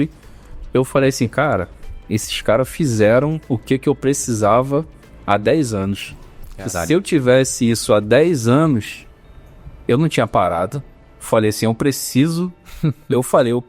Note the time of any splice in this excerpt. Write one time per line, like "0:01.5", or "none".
none

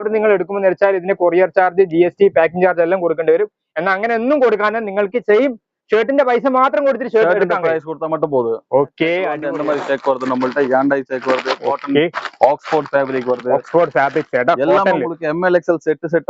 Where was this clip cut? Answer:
0:09.5

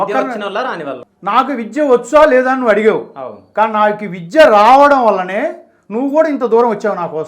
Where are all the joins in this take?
0:01.0

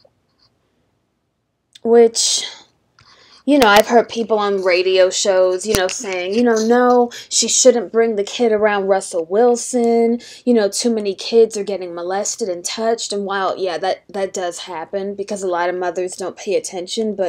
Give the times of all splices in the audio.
none

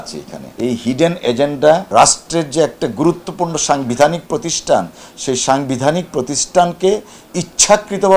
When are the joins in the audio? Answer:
0:01.9

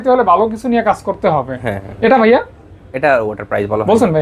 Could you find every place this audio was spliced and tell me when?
none

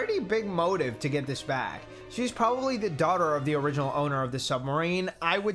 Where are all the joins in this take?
none

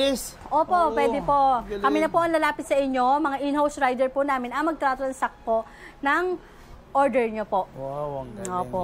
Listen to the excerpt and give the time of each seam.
none

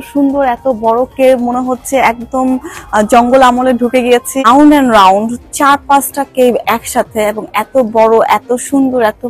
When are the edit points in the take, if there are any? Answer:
0:04.4

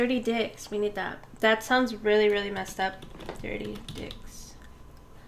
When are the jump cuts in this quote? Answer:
none

